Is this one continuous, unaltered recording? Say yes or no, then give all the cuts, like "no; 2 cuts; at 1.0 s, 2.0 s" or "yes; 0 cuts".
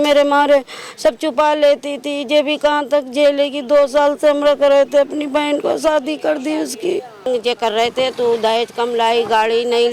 no; 1 cut; at 7.3 s